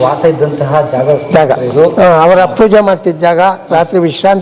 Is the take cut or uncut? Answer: uncut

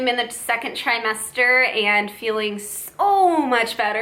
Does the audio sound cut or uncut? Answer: uncut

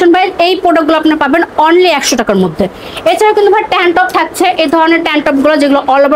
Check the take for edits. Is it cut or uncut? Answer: uncut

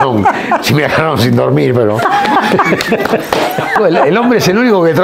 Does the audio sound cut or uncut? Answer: cut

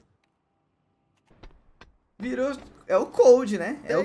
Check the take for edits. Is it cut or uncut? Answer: cut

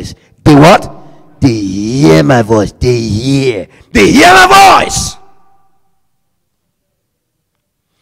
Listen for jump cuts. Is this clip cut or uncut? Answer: cut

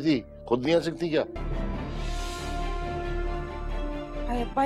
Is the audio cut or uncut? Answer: cut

